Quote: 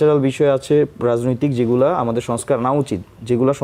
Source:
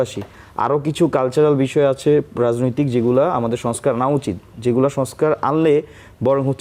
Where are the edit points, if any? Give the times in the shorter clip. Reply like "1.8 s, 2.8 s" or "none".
none